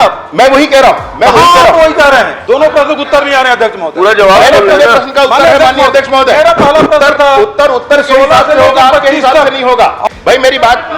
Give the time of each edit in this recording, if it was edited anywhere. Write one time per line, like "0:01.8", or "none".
0:02.3
0:10.0